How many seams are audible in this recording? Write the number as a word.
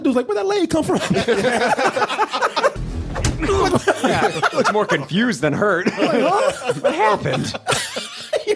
one